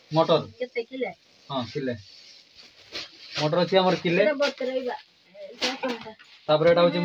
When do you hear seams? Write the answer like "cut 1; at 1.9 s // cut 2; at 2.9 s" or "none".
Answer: none